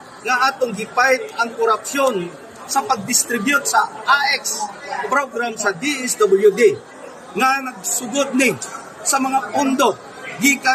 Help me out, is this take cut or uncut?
uncut